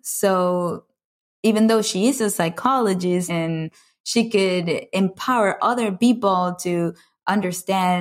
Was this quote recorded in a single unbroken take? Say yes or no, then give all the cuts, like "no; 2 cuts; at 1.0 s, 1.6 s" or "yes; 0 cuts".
no; 1 cut; at 3.3 s